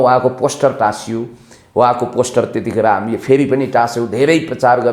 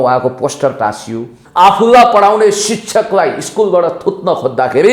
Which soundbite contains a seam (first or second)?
second